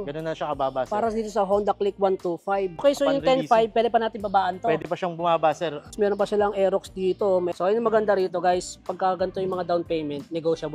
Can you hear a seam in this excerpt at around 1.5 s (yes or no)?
no